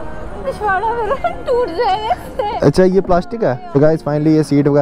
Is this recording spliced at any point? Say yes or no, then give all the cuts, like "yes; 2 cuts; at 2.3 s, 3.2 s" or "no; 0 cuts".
yes; 1 cut; at 3.6 s